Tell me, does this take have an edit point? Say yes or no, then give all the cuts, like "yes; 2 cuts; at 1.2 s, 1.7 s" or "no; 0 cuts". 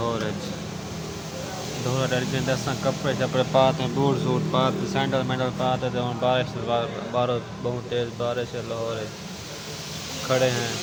no; 0 cuts